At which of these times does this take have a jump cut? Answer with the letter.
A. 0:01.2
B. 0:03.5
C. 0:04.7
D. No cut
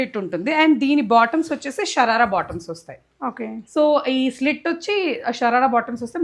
D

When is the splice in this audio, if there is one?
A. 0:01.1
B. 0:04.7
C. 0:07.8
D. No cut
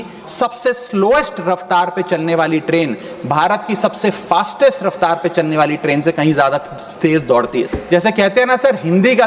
C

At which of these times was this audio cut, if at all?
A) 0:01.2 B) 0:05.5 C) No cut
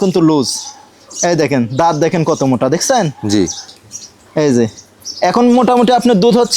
C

